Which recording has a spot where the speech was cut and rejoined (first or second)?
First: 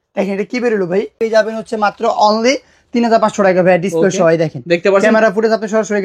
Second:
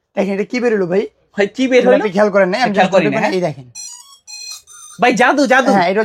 first